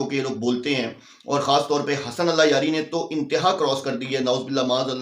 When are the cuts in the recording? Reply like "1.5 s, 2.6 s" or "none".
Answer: none